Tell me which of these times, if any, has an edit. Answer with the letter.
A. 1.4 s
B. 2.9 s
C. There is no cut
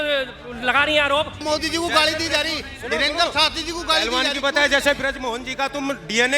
A